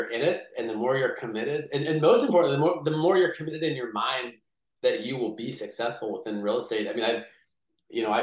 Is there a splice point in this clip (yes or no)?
no